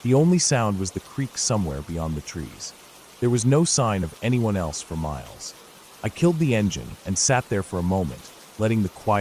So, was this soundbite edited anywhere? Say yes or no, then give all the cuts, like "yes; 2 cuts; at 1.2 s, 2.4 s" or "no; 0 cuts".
no; 0 cuts